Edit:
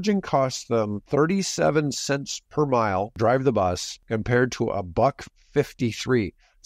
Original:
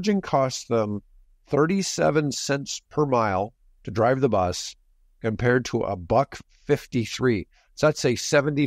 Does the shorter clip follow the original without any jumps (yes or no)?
no